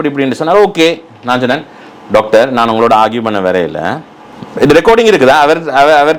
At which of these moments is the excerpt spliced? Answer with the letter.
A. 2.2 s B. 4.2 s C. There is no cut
C